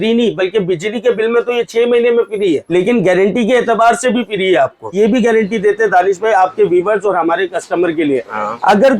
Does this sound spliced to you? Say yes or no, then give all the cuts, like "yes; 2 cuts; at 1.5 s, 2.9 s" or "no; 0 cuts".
yes; 2 cuts; at 2.6 s, 4.9 s